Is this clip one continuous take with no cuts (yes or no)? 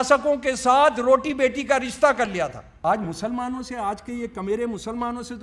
no